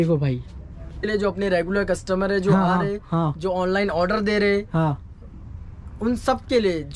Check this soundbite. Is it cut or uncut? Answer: cut